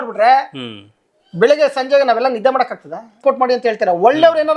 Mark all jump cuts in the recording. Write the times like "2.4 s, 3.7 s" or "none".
3.2 s